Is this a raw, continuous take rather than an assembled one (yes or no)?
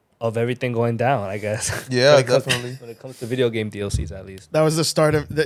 yes